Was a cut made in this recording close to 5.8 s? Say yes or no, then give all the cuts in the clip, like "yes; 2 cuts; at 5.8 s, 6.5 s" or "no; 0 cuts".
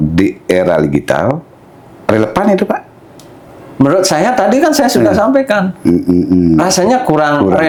no; 0 cuts